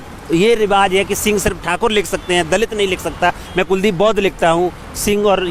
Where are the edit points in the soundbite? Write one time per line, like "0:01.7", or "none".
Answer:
none